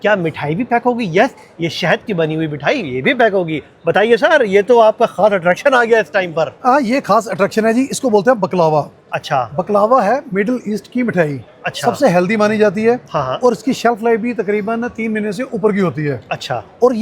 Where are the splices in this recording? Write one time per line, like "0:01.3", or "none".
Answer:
none